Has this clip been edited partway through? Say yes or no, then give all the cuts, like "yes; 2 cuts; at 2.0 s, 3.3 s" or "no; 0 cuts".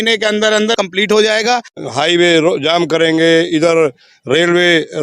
yes; 2 cuts; at 0.8 s, 1.8 s